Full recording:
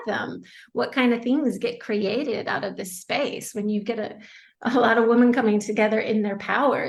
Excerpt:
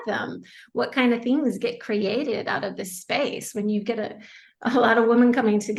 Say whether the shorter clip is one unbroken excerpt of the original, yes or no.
yes